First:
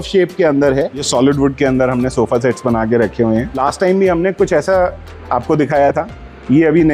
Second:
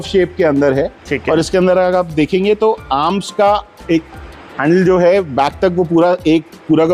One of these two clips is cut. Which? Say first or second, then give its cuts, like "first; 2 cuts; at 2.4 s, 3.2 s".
first; 2 cuts; at 1.0 s, 3.5 s